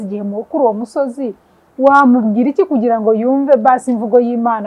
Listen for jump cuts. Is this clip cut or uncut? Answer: uncut